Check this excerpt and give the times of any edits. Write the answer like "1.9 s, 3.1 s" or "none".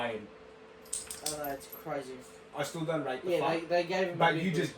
2.4 s